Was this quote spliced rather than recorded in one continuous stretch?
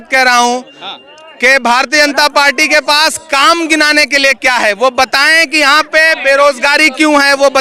no; 0 cuts

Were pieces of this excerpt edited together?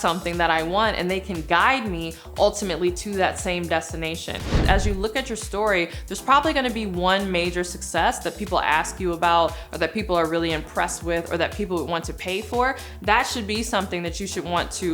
yes; 1 cut; at 4.6 s

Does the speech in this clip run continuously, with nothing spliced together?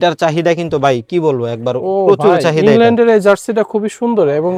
yes; 0 cuts

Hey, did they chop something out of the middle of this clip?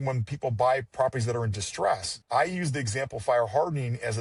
no; 0 cuts

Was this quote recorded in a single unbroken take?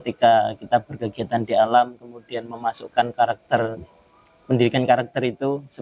yes; 0 cuts

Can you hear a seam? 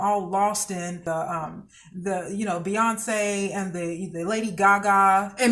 yes; 1 cut; at 1.0 s

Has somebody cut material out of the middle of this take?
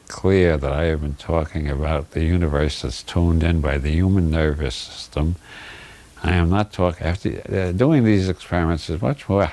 no; 0 cuts

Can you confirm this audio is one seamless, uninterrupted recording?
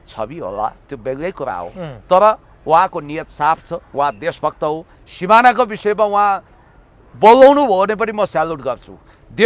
yes; 0 cuts

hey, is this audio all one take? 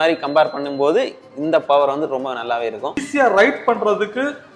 no; 1 cut; at 3.0 s

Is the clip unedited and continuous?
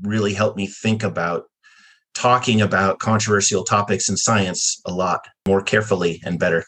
no; 1 cut; at 5.4 s

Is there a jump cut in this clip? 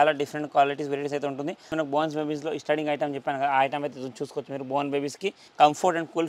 yes; 2 cuts; at 1.7 s, 5.4 s

